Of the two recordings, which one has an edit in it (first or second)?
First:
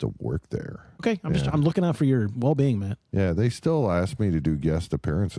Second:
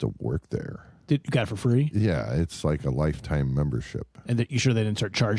first